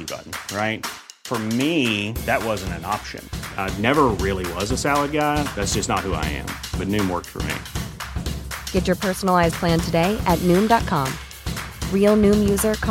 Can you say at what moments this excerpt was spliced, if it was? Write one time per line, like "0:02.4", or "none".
none